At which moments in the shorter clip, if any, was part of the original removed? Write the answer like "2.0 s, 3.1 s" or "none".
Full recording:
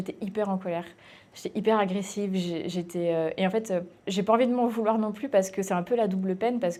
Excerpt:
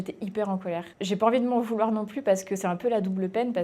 0.9 s

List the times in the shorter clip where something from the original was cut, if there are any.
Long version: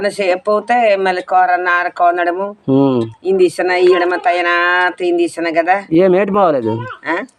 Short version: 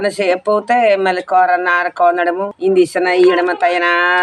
2.5 s

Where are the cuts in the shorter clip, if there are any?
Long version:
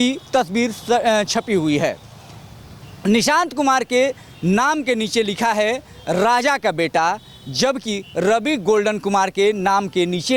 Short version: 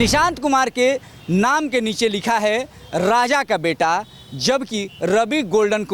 none

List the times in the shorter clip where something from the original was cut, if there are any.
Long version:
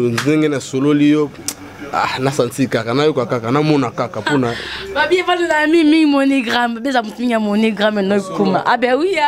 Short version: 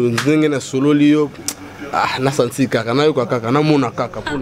none

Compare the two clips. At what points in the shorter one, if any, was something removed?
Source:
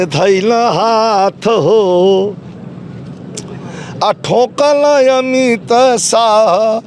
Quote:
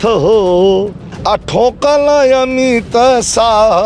1.0 s

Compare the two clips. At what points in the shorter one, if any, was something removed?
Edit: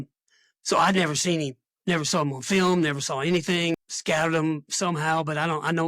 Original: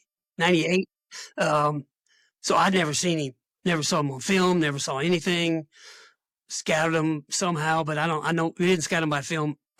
3.8 s

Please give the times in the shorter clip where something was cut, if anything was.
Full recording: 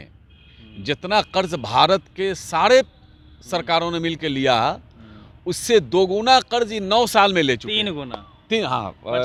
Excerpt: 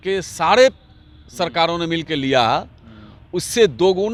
none

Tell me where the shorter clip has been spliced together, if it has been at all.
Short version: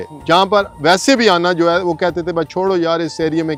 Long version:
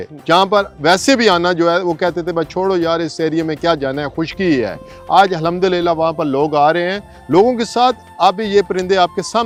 none

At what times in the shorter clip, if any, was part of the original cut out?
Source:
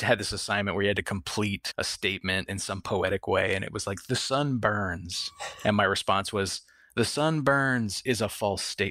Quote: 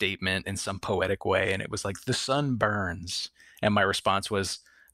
none

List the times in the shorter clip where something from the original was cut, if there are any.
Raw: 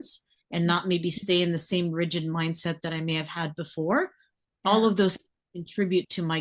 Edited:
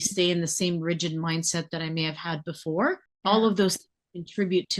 3.1 s

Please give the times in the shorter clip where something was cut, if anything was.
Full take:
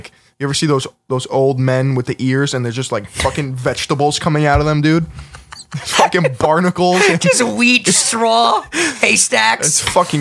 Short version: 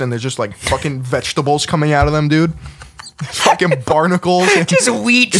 none

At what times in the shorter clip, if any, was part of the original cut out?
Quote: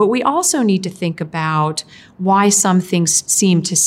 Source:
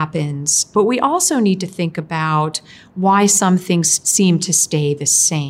none

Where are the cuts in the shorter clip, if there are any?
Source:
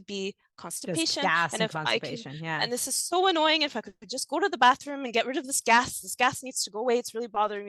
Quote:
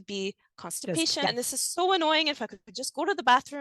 1.3 s

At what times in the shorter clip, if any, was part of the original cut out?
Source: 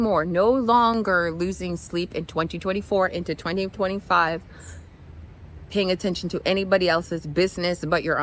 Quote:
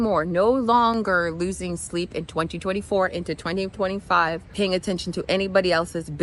4.5 s

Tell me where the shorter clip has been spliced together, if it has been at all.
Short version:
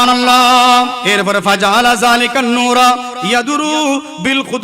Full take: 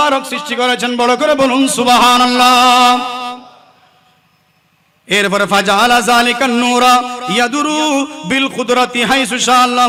1.0 s

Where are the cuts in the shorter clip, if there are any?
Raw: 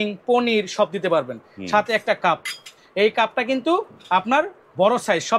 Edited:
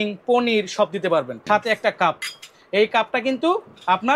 1.3 s

